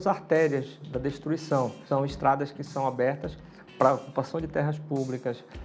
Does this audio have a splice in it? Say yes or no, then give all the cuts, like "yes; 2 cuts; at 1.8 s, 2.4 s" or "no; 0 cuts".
yes; 1 cut; at 1.8 s